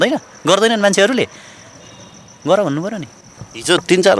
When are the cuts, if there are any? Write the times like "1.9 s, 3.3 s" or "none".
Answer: none